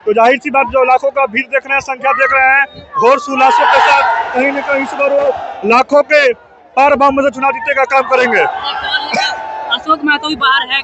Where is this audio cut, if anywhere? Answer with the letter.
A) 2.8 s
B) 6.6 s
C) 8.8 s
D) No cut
D